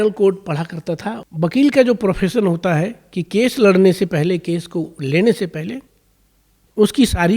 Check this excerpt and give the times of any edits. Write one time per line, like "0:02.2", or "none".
0:01.1